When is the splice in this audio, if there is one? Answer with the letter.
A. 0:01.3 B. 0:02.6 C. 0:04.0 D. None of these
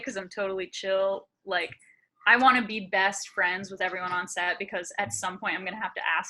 D